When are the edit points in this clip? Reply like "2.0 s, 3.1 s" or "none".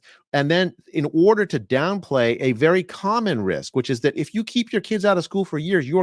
none